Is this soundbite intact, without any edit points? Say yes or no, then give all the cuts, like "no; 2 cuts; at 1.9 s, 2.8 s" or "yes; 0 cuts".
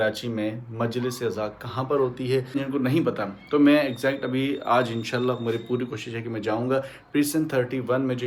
yes; 0 cuts